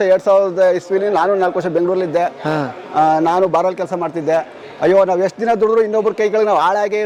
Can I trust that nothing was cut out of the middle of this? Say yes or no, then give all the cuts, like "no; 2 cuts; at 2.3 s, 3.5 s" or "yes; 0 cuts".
yes; 0 cuts